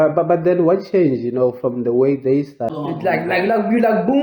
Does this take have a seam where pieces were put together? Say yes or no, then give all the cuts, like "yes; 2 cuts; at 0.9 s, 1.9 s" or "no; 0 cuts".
yes; 1 cut; at 2.7 s